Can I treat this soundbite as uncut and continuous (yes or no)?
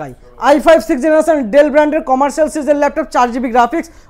yes